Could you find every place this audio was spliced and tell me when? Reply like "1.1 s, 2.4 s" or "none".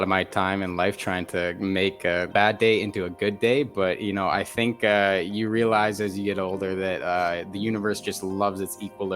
2.3 s